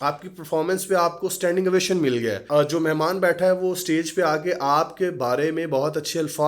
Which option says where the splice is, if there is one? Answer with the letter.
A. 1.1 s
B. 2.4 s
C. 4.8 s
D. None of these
B